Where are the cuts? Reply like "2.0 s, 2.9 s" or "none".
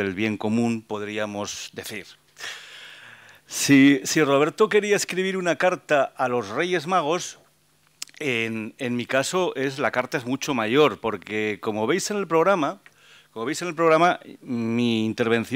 4.4 s